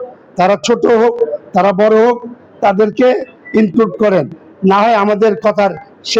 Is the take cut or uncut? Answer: uncut